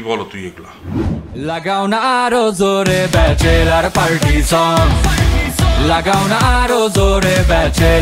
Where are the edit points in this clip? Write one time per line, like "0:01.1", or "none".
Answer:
0:01.2